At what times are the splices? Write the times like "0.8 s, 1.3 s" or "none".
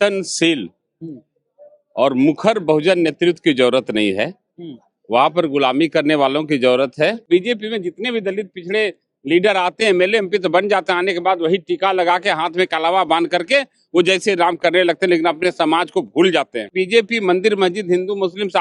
7.2 s, 16.7 s